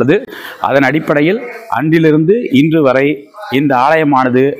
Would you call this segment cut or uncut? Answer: uncut